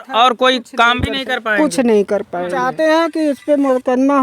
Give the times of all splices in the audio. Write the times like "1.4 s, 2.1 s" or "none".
2.6 s